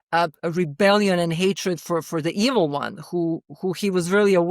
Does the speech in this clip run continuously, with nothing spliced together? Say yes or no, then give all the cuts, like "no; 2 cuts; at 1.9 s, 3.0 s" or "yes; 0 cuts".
no; 1 cut; at 2.1 s